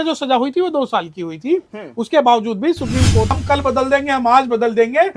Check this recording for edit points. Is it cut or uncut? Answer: cut